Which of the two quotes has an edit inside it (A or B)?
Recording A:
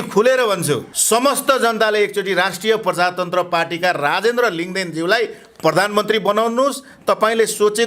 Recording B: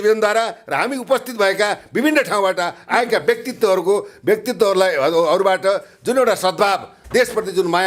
A